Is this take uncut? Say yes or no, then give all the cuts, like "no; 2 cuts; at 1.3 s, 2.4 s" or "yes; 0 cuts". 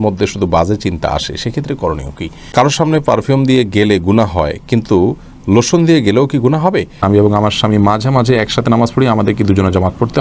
no; 2 cuts; at 2.5 s, 7.0 s